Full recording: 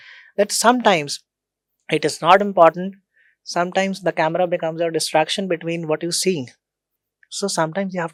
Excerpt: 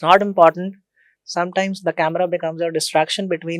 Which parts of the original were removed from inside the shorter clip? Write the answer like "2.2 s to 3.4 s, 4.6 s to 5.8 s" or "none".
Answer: none